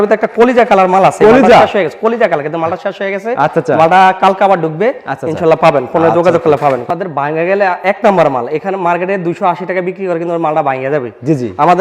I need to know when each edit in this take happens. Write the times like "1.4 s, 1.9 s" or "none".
6.9 s